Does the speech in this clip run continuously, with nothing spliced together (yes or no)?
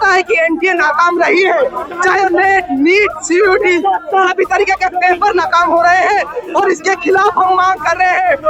yes